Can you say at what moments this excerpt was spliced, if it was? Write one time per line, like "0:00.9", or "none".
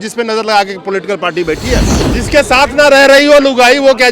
0:02.0